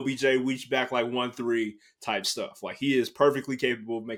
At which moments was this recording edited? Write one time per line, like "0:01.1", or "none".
none